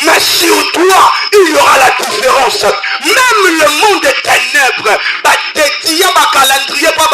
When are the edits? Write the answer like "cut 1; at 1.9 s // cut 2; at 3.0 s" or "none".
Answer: none